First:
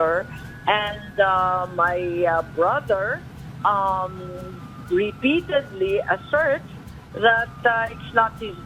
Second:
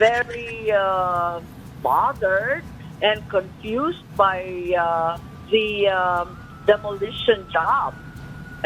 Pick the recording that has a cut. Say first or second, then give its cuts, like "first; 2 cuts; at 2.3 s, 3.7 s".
second; 1 cut; at 5.3 s